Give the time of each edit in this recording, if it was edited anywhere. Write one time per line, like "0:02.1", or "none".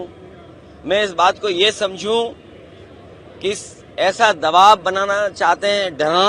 none

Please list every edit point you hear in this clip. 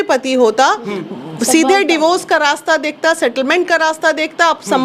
none

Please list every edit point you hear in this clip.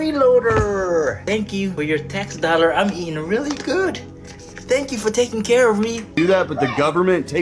0:01.4
0:06.1

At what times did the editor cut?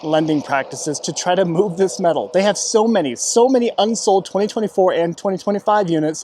none

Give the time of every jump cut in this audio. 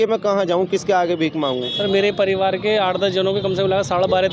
0:01.7

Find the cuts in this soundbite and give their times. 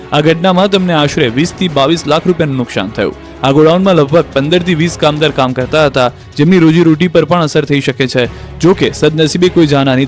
0:06.2

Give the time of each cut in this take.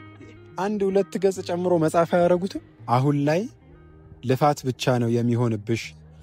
0:03.0

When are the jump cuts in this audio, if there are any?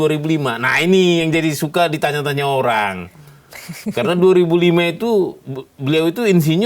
none

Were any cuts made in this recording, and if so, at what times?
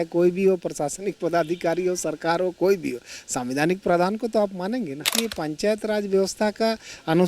0:05.1

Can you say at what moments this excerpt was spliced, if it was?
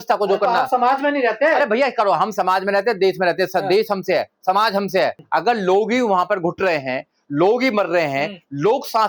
0:05.2

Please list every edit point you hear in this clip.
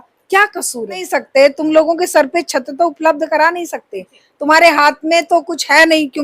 0:01.1

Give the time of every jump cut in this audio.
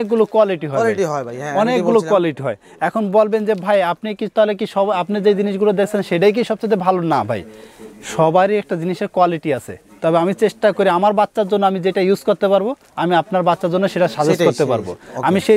none

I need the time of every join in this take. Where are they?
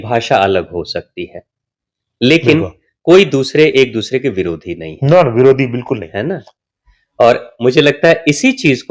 0:06.5

